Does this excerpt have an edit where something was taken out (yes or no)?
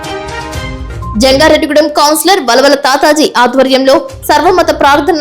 yes